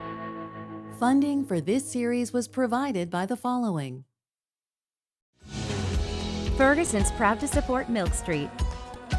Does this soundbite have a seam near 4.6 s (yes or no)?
no